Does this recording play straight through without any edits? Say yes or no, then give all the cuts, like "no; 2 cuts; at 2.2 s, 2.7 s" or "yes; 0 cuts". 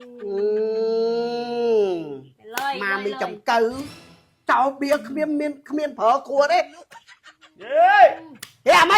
yes; 0 cuts